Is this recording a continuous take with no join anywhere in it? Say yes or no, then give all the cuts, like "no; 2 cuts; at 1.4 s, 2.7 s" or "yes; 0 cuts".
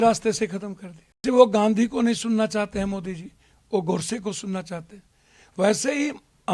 no; 1 cut; at 1.2 s